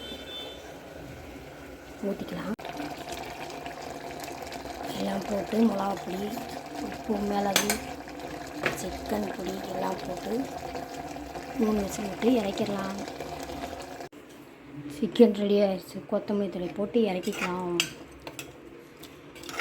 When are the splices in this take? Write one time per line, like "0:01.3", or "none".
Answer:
0:14.2